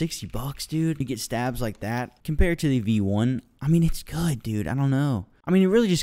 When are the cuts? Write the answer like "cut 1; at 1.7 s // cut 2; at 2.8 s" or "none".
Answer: cut 1; at 1.0 s // cut 2; at 2.1 s